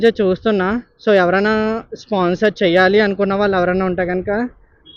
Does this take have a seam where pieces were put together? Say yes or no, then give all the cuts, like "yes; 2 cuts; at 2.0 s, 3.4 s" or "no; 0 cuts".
no; 0 cuts